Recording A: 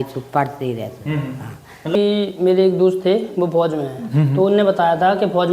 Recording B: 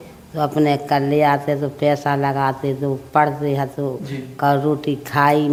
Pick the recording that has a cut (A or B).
A